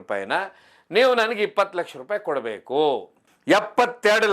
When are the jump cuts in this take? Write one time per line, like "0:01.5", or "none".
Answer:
0:03.2